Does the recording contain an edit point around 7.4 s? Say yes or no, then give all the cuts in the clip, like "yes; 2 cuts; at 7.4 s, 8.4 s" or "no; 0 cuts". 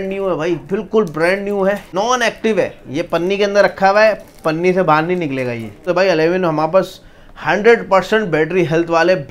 no; 2 cuts; at 1.9 s, 5.9 s